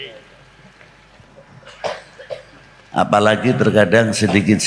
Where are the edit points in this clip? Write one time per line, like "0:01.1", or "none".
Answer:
none